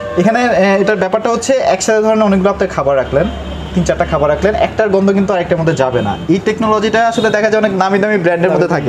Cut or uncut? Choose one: uncut